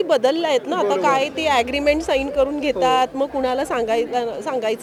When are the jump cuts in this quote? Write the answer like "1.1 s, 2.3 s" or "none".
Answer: none